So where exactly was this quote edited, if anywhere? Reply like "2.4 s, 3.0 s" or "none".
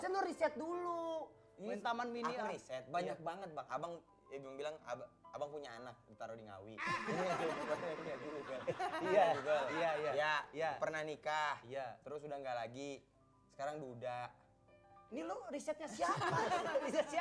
none